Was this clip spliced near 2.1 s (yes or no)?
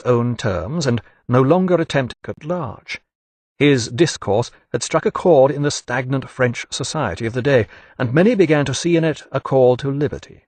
no